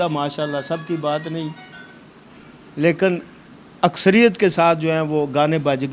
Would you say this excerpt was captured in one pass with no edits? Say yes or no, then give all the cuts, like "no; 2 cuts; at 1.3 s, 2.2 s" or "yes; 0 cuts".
yes; 0 cuts